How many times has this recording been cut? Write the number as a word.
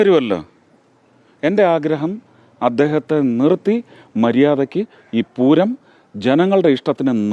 zero